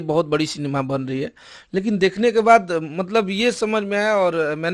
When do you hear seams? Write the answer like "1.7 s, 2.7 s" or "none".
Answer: none